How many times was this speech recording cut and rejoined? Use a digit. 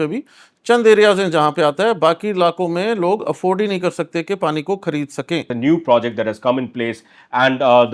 1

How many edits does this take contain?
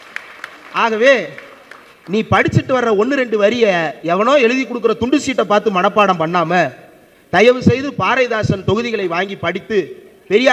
0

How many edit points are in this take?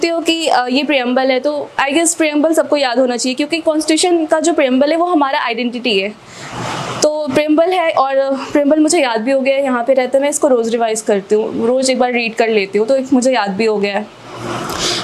0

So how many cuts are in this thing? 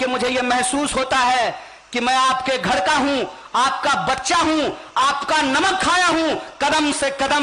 0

